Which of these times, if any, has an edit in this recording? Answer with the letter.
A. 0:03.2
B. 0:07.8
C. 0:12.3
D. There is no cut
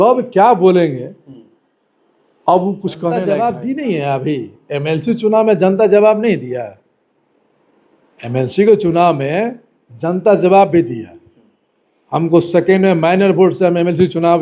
A